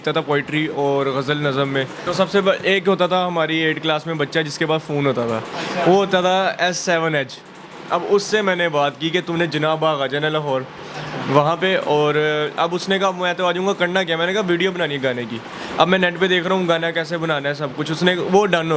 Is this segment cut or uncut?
cut